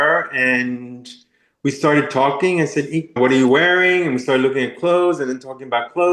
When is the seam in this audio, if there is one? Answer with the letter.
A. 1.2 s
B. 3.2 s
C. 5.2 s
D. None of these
B